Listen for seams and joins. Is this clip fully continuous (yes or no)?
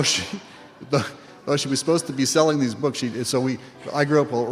yes